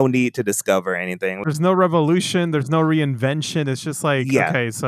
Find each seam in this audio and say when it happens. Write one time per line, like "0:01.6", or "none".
0:01.4